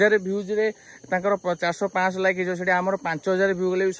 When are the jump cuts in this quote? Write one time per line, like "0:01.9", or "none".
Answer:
none